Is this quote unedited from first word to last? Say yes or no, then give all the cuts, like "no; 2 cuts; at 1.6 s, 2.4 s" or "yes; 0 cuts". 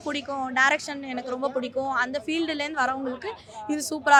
yes; 0 cuts